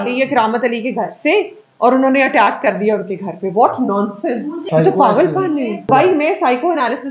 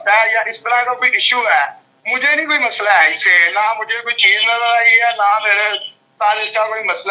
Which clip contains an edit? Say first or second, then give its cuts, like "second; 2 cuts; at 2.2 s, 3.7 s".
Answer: first; 2 cuts; at 4.6 s, 5.9 s